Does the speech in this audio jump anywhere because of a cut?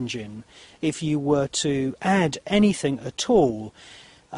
yes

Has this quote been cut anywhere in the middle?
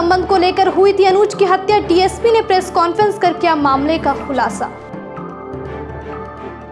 no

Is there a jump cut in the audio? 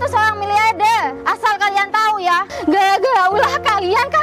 yes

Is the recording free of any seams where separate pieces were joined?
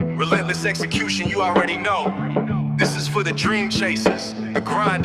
yes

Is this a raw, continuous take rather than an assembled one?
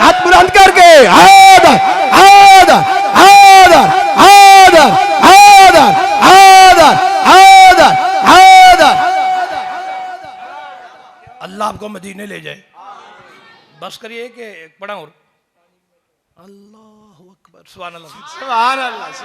yes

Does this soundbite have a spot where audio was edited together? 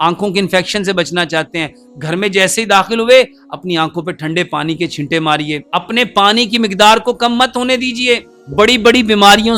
yes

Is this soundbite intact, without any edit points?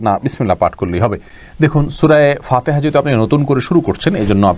yes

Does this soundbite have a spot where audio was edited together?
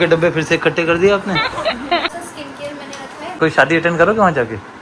yes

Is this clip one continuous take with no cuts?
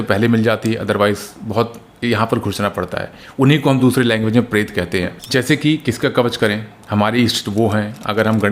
no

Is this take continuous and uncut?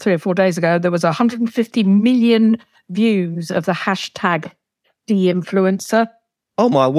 yes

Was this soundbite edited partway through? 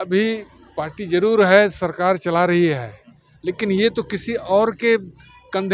no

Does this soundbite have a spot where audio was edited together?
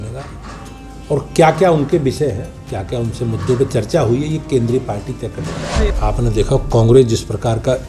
yes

